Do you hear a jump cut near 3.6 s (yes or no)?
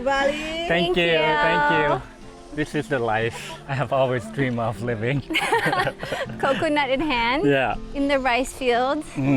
yes